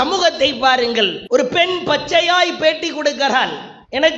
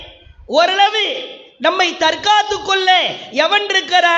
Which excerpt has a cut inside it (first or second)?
first